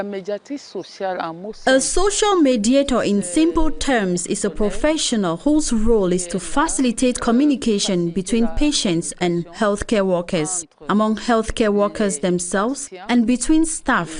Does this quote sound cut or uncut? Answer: cut